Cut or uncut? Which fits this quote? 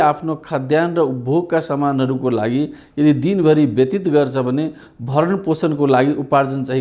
uncut